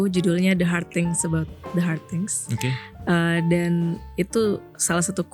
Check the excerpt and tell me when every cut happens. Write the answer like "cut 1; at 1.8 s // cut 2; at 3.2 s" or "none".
none